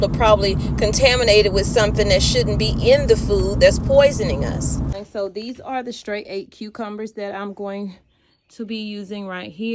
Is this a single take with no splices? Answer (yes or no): no